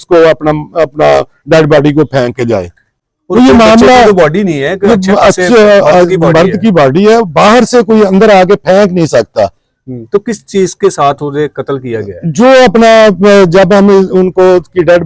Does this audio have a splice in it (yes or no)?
no